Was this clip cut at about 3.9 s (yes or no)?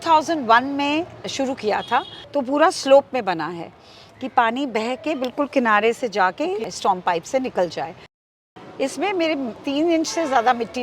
no